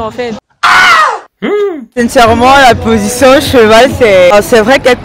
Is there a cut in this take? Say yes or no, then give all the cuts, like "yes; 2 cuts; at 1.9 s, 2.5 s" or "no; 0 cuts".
yes; 1 cut; at 1.9 s